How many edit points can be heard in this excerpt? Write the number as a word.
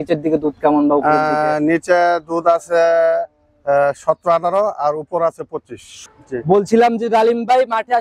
one